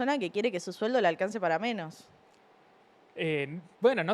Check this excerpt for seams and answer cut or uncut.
uncut